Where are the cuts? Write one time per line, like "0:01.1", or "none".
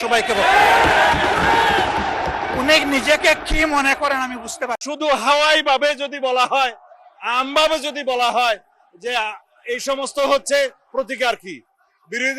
0:04.8